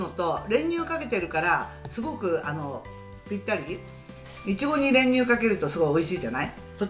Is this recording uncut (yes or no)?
yes